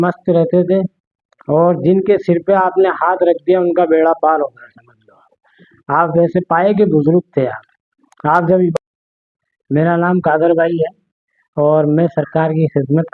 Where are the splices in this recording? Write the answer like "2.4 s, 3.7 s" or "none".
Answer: 8.7 s

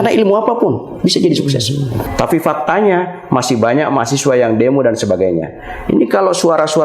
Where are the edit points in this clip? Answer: 2.0 s

